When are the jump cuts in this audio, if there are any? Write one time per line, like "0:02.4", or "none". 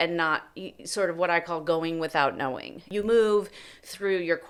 none